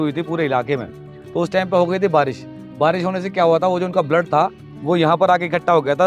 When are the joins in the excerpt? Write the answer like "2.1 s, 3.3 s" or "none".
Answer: none